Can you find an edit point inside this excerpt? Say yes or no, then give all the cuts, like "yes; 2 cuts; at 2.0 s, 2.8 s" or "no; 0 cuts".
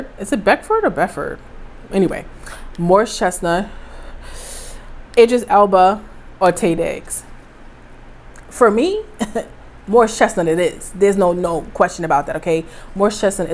no; 0 cuts